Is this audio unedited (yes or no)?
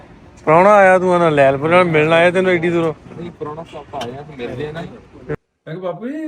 no